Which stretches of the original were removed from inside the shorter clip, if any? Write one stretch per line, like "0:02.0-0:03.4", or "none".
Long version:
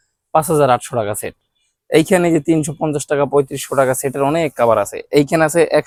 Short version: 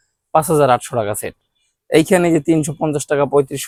none

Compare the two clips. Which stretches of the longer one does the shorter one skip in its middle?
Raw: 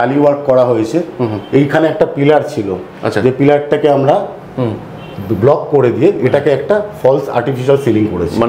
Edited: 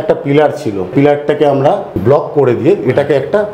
0:02.8-0:03.3
0:04.3-0:05.3

